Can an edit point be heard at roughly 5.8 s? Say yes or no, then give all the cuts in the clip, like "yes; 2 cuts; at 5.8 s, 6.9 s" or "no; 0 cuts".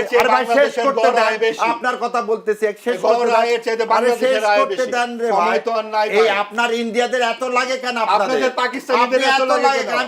no; 0 cuts